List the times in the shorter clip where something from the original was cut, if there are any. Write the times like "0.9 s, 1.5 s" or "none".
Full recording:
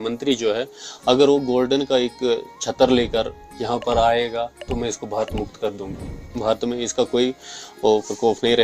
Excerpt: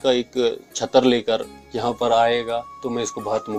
none